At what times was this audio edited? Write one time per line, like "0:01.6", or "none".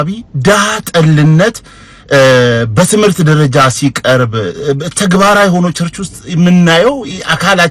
none